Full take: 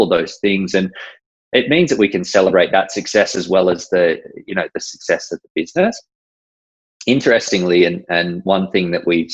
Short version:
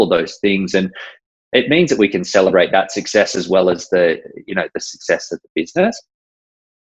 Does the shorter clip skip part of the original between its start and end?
no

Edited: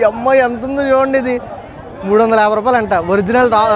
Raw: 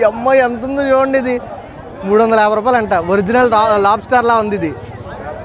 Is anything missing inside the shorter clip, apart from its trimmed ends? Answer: no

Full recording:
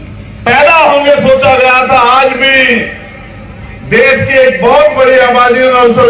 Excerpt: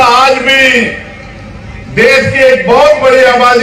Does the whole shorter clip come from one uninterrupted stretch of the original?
yes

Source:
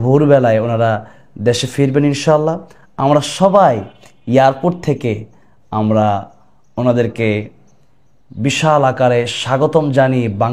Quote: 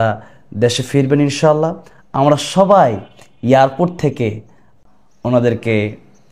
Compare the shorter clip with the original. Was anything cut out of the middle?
yes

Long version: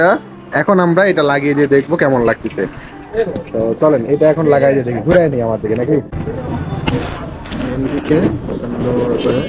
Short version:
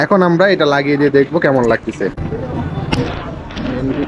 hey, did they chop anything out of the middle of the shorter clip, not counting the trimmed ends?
yes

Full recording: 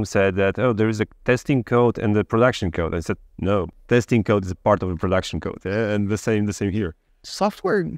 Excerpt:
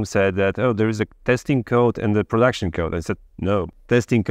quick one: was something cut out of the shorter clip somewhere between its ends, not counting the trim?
no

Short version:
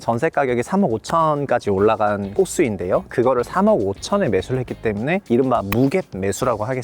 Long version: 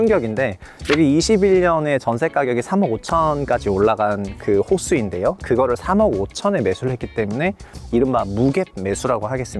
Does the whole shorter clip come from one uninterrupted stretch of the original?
no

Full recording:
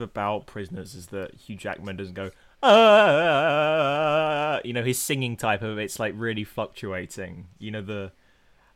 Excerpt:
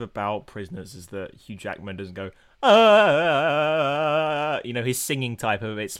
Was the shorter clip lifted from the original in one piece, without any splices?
yes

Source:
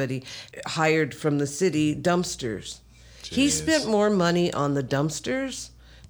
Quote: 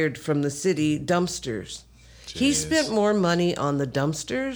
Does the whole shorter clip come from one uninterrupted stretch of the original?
yes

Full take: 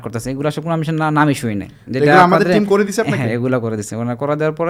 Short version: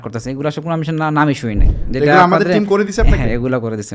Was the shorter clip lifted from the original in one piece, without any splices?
yes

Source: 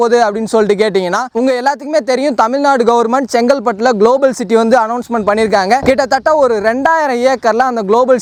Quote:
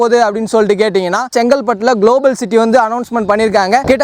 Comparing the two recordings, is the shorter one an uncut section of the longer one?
no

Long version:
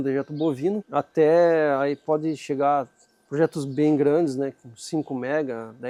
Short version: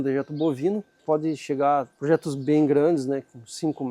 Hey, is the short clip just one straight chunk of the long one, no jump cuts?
no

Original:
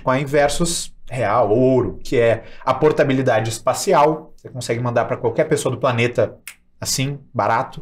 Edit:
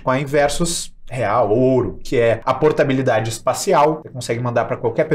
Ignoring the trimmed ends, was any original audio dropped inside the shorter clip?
yes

